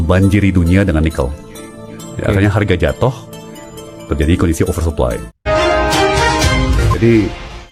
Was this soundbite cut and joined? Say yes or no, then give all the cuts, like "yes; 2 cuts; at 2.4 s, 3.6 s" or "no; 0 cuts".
no; 0 cuts